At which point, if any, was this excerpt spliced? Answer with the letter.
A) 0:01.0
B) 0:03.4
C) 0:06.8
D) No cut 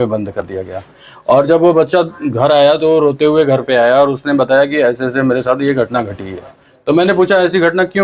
D